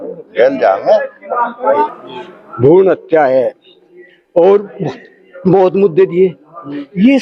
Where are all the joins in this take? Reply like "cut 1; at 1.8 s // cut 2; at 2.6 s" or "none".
cut 1; at 1.9 s